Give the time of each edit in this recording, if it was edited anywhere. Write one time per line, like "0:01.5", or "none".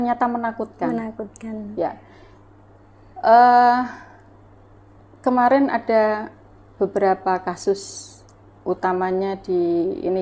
none